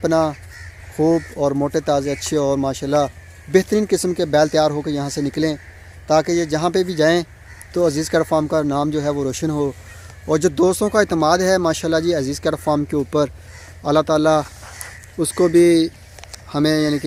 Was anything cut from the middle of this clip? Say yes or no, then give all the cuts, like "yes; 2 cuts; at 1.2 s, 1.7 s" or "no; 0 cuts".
no; 0 cuts